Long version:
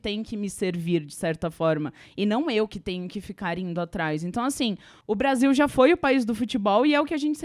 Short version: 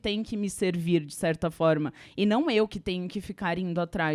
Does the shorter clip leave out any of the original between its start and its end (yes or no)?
no